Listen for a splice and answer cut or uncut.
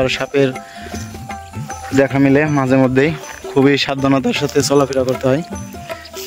uncut